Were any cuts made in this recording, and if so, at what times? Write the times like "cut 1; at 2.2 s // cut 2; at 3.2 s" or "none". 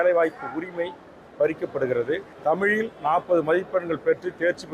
cut 1; at 2.3 s